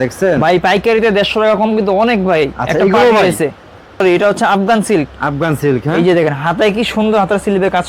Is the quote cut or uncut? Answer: cut